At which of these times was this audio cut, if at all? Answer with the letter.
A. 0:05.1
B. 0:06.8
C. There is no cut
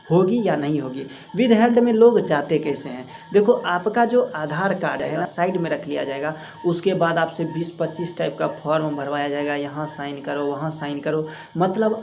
A